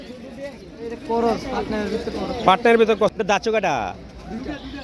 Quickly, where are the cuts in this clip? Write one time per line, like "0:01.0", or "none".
0:03.0